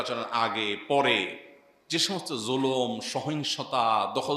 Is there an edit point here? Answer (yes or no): no